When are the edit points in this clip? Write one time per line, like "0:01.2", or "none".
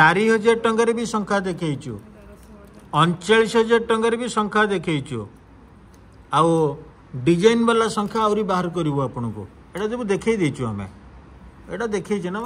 none